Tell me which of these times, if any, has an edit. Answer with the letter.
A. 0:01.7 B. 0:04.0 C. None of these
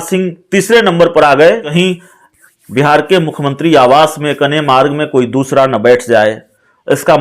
A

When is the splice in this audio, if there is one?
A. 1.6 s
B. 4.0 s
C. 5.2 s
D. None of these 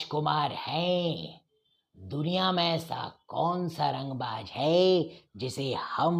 D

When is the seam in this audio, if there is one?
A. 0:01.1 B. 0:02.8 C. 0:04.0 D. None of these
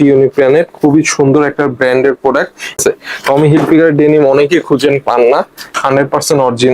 B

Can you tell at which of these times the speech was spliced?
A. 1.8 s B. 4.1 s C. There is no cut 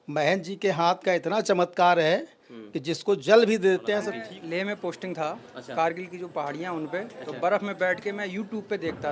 B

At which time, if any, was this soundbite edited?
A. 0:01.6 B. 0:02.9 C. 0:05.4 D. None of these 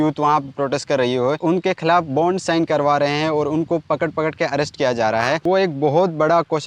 C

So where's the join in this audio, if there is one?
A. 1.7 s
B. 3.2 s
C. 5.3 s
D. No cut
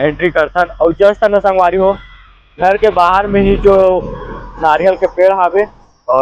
D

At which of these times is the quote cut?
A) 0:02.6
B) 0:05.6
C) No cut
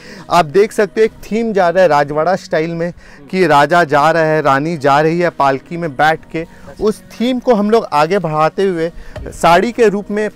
C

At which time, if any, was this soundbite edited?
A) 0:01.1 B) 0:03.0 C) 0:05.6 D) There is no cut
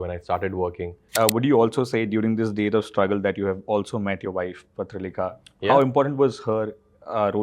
A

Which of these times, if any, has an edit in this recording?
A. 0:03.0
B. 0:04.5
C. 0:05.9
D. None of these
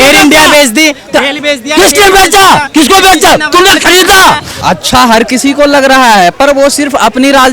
B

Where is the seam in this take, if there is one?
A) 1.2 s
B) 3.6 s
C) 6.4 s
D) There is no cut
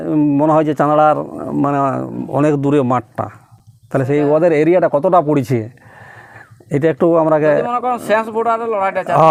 D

